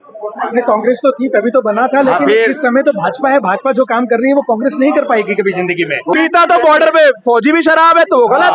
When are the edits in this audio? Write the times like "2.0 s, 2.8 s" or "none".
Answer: 6.1 s